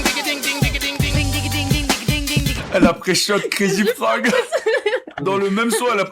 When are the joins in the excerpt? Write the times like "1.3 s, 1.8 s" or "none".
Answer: 1.1 s, 5.1 s